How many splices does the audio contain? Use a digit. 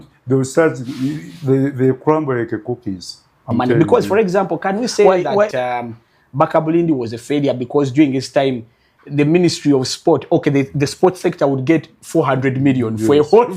1